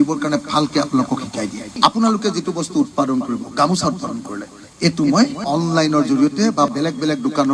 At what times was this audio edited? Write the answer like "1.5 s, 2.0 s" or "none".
none